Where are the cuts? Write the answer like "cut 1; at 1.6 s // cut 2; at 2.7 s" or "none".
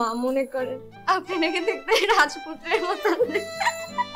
none